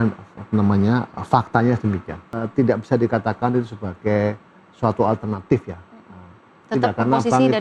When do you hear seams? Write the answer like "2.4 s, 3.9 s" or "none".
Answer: 2.4 s